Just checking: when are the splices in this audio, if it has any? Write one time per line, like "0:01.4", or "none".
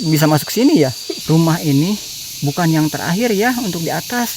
0:01.1